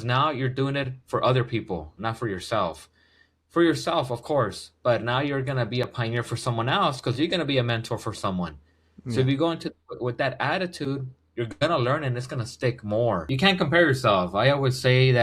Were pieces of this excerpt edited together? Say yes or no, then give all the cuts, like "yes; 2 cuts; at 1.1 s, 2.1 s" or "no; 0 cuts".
yes; 1 cut; at 13.2 s